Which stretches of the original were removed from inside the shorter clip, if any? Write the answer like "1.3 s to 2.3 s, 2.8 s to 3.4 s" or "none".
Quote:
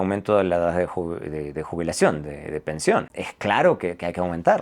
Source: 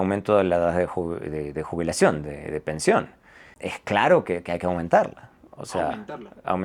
3.2 s to 3.7 s